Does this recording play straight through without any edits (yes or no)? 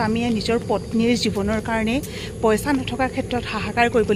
yes